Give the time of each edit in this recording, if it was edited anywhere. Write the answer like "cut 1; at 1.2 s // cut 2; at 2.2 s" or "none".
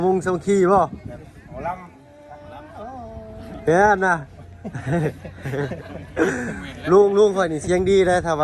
cut 1; at 2.5 s